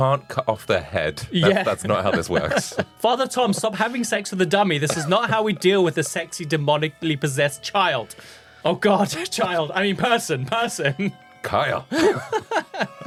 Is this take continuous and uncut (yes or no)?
yes